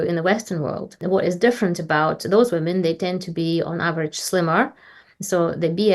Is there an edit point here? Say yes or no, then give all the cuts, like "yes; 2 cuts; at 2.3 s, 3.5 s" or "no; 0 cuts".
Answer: yes; 1 cut; at 1.0 s